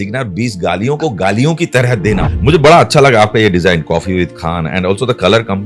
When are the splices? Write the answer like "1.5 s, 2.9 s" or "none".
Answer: 2.3 s